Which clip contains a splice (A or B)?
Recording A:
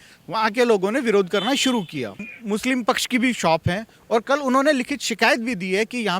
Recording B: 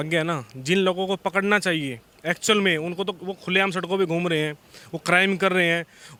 A